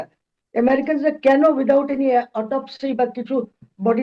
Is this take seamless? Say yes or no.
yes